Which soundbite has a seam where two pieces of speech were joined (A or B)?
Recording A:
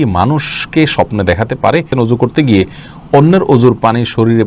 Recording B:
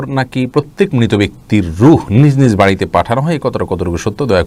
A